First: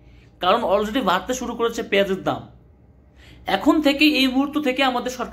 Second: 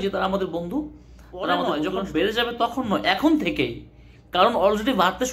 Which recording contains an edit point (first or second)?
second